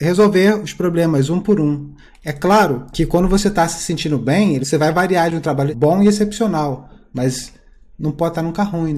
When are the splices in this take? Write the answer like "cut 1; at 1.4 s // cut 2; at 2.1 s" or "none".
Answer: cut 1; at 2.8 s // cut 2; at 4.6 s // cut 3; at 5.7 s